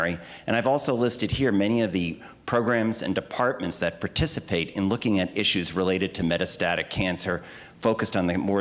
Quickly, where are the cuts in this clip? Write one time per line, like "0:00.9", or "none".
0:04.8